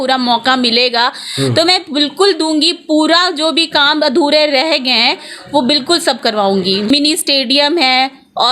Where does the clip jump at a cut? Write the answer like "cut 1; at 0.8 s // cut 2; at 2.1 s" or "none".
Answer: cut 1; at 6.9 s